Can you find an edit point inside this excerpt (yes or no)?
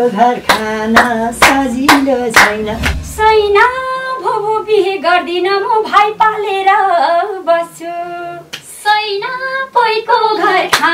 yes